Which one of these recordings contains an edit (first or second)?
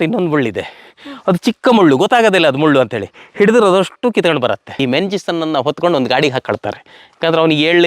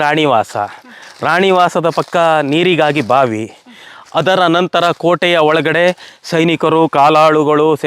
first